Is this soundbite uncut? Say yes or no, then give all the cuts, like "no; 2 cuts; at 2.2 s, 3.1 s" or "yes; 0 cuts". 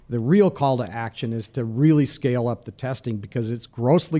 yes; 0 cuts